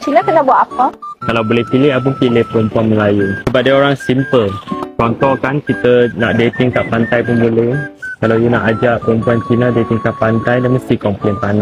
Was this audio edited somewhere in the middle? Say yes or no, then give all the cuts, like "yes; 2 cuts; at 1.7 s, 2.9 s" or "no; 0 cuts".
no; 0 cuts